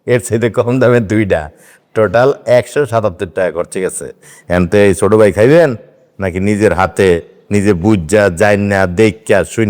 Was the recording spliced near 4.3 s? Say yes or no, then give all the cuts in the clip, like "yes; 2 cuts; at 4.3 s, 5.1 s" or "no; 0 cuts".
yes; 1 cut; at 4.3 s